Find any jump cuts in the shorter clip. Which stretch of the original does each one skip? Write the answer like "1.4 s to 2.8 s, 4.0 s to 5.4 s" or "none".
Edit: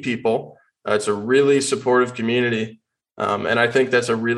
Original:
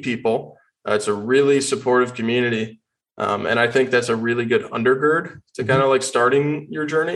none